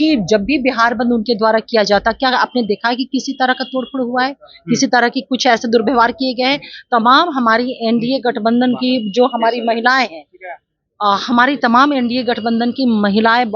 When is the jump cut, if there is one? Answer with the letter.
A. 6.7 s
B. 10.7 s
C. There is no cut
C